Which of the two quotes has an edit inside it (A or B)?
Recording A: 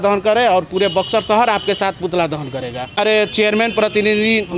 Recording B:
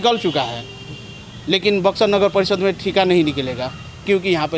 A